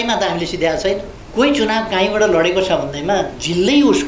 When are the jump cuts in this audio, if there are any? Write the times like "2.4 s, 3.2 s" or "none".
1.2 s